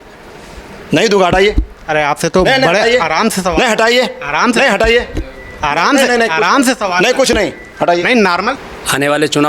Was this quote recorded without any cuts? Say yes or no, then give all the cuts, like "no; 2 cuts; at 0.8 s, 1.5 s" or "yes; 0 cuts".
no; 1 cut; at 8.6 s